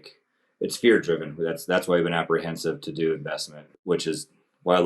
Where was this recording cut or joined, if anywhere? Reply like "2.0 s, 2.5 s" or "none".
3.7 s